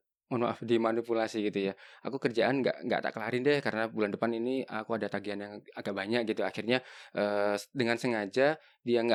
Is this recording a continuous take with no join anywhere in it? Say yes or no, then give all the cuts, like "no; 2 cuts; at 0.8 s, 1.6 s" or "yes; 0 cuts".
yes; 0 cuts